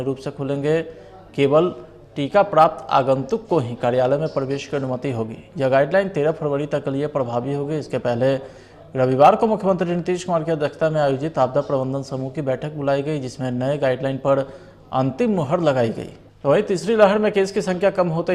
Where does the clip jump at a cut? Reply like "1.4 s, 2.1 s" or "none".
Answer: 16.4 s